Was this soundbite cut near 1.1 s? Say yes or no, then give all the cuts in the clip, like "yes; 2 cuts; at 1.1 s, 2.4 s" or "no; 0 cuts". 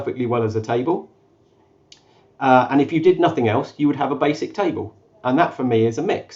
no; 0 cuts